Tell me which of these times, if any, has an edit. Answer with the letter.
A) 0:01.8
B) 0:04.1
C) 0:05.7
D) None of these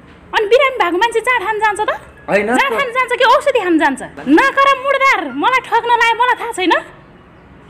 B